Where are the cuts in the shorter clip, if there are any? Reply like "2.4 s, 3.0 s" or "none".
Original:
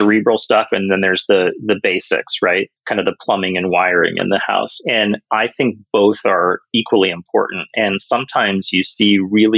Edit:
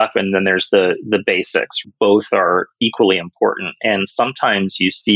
1.8 s